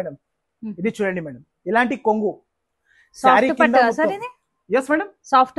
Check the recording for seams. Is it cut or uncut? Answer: uncut